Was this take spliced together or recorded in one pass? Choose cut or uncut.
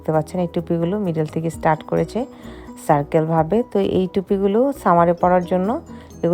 uncut